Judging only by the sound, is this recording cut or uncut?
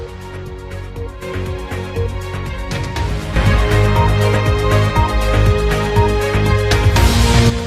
cut